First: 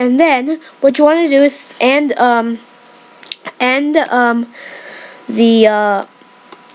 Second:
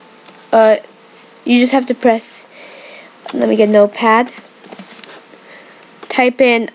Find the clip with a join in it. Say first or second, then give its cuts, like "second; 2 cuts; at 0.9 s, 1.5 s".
first; 1 cut; at 5.7 s